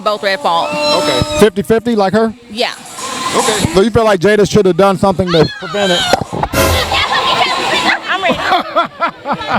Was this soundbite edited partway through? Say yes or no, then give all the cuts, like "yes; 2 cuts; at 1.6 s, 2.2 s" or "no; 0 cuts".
no; 0 cuts